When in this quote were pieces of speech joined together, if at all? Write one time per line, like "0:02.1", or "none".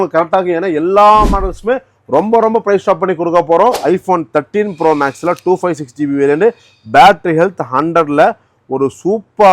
0:03.8